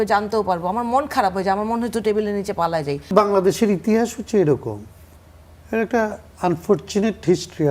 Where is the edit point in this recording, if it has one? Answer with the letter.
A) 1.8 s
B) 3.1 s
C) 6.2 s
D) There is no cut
B